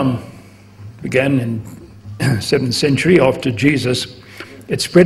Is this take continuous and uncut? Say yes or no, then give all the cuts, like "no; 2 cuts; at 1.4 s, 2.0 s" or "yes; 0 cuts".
yes; 0 cuts